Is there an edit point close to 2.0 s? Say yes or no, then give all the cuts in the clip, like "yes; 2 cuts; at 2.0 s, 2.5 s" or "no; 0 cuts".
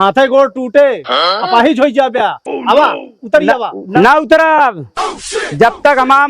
no; 1 cut; at 3.9 s